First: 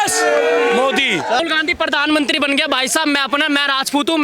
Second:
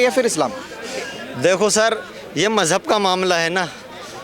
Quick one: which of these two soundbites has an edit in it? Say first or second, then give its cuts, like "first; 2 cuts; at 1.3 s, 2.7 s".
first; 1 cut; at 1.4 s